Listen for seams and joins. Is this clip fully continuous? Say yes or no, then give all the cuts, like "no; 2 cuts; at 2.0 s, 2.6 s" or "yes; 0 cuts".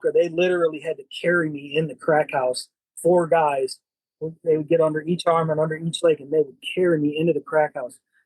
yes; 0 cuts